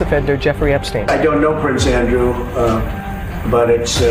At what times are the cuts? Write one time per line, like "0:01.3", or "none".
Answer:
none